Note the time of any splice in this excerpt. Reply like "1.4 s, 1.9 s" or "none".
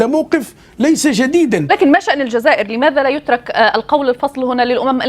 1.7 s